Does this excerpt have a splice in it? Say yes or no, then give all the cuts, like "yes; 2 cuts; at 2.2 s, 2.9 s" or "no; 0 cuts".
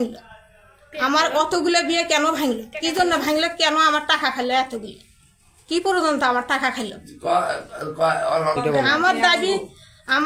no; 0 cuts